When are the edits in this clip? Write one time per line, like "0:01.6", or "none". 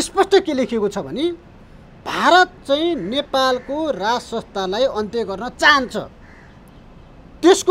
none